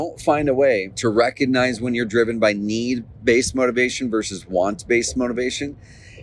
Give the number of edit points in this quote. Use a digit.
1